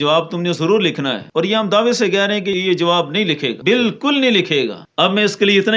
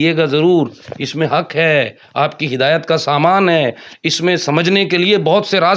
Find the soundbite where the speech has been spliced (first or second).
first